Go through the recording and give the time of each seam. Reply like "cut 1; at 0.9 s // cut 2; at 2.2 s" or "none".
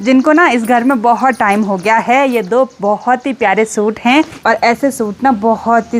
cut 1; at 4.3 s